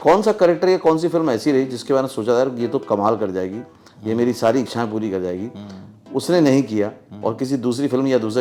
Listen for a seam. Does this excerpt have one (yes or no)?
no